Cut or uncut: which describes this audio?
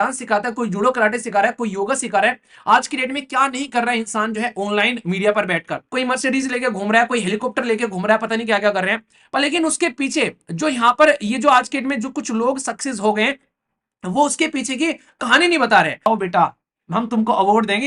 cut